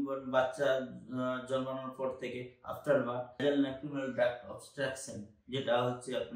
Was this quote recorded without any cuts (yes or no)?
no